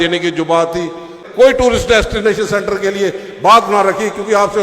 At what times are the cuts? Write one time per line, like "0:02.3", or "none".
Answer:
0:01.2

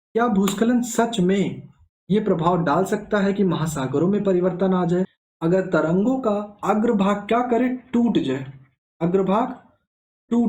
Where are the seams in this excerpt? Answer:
0:05.2

